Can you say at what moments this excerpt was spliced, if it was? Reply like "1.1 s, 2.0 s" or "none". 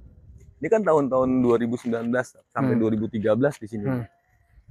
none